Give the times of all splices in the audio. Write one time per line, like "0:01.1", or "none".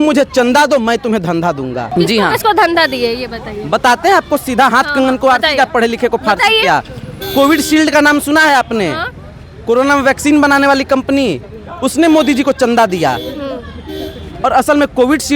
0:01.8